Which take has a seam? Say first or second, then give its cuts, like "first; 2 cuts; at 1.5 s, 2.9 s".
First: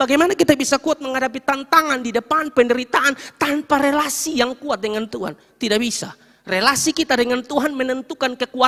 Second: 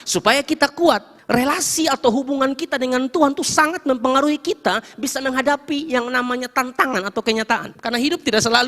second; 2 cuts; at 1.1 s, 7.7 s